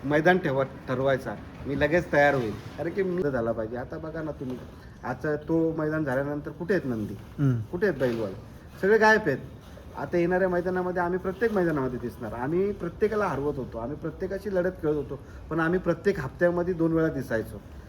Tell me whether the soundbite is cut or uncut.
cut